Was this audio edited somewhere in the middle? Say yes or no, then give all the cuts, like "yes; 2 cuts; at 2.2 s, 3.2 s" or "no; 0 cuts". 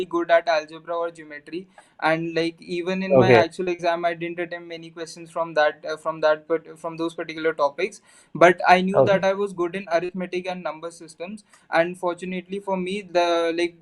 no; 0 cuts